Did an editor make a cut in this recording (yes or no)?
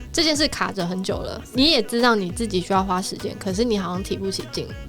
no